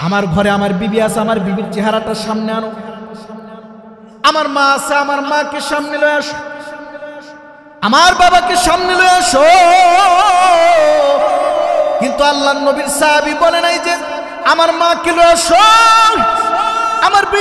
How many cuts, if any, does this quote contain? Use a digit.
0